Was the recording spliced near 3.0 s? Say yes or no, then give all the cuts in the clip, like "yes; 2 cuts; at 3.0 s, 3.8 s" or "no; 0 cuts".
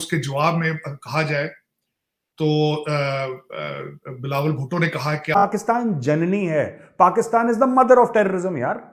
no; 1 cut; at 5.3 s